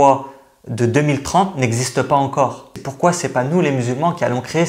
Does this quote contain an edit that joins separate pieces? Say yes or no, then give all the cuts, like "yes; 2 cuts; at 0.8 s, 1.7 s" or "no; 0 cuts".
yes; 1 cut; at 2.8 s